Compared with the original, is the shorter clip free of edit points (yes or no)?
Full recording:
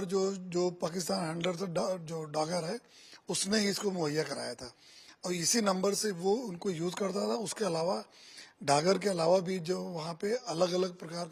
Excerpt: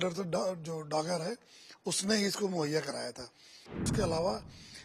no